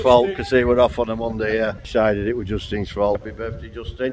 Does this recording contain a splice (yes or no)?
yes